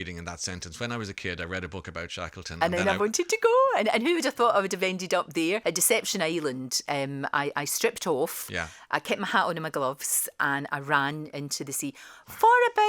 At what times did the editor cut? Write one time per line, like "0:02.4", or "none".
0:05.6